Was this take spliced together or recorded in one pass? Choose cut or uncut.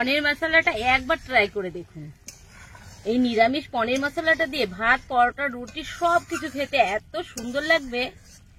uncut